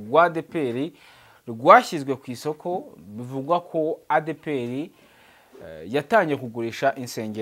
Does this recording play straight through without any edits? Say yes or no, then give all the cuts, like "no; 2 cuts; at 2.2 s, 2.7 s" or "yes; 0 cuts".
yes; 0 cuts